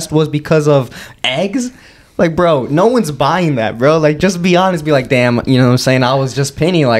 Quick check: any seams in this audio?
no; 0 cuts

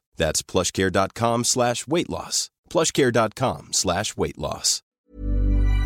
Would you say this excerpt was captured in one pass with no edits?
no; 1 cut; at 5.0 s

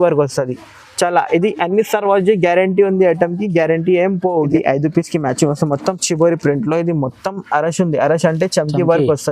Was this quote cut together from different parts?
yes; 1 cut; at 4.4 s

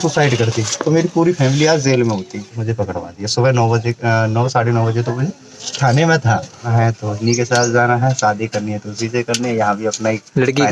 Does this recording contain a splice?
yes; 2 cuts; at 2.6 s, 6.7 s

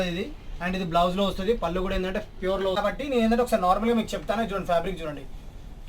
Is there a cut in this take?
yes; 1 cut; at 2.8 s

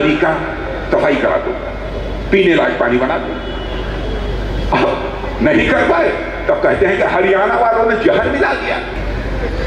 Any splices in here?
no; 0 cuts

